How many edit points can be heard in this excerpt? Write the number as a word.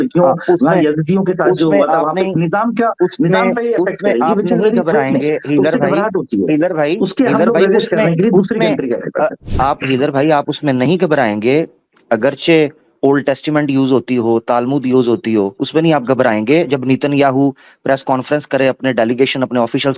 one